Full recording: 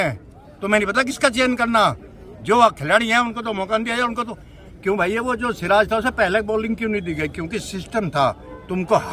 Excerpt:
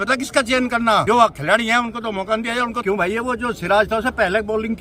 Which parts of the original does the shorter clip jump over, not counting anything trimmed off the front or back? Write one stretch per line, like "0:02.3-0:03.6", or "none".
0:01.9-0:02.5
0:04.2-0:04.8